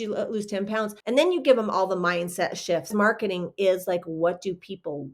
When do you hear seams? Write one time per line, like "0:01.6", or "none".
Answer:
0:01.0
0:02.9